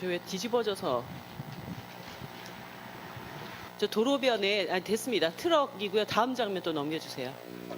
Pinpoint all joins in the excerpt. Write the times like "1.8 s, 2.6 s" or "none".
4.1 s